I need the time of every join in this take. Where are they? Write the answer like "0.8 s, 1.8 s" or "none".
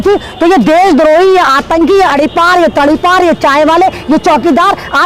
none